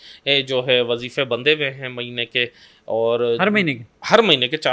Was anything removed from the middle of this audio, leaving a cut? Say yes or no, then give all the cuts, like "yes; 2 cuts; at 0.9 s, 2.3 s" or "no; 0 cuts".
no; 0 cuts